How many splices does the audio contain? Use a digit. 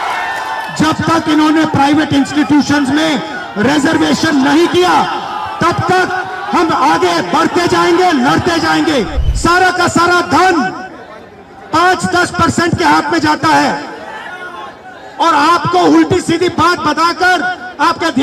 1